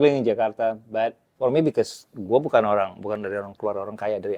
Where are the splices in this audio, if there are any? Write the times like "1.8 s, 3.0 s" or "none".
1.2 s